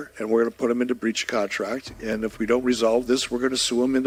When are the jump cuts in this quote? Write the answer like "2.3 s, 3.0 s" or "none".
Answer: none